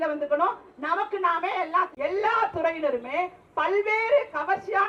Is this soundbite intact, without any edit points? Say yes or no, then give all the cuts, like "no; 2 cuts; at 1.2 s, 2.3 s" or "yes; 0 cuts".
no; 1 cut; at 1.9 s